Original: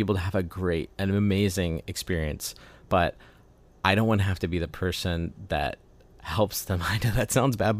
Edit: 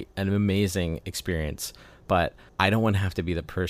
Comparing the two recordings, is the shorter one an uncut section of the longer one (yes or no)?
no